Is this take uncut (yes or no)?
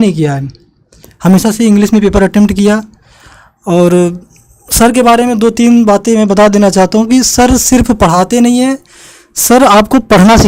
yes